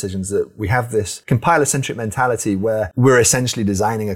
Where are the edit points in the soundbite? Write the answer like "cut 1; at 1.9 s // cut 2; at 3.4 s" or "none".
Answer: cut 1; at 1.2 s // cut 2; at 2.9 s